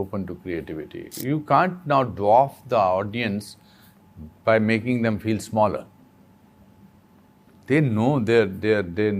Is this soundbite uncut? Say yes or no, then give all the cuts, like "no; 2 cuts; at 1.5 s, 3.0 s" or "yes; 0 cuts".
no; 1 cut; at 1.1 s